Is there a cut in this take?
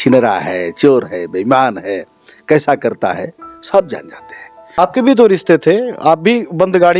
yes; 1 cut; at 4.6 s

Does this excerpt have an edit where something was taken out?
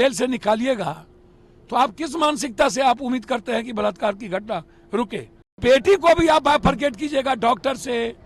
yes; 1 cut; at 5.6 s

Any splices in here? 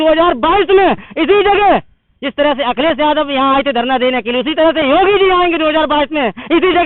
no; 0 cuts

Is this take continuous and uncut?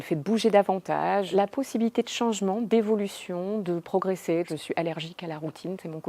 no; 2 cuts; at 1.3 s, 4.5 s

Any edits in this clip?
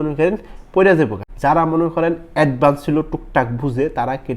yes; 1 cut; at 1.2 s

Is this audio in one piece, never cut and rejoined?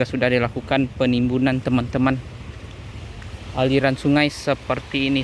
yes; 0 cuts

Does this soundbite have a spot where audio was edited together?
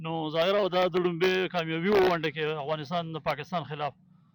no; 0 cuts

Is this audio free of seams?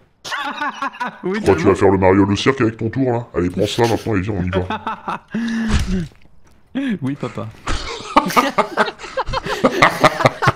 yes; 0 cuts

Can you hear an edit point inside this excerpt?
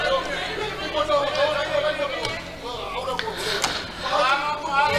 no; 0 cuts

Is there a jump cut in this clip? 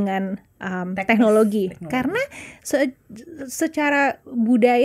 no; 0 cuts

